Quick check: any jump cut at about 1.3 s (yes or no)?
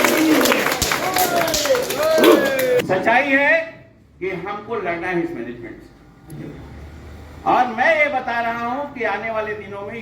no